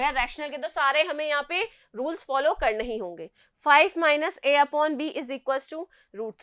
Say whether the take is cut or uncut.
cut